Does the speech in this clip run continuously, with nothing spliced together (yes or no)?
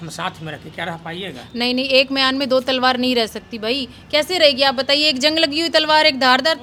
yes